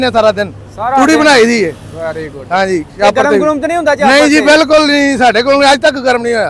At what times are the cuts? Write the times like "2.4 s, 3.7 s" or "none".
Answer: none